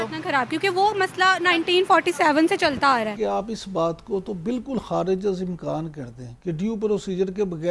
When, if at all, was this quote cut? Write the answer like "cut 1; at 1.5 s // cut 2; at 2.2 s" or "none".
cut 1; at 3.4 s